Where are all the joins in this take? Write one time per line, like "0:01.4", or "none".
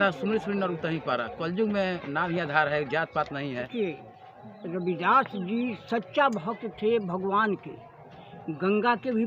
0:03.7